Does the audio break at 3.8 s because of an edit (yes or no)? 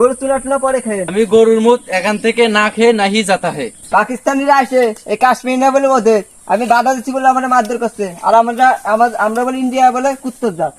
yes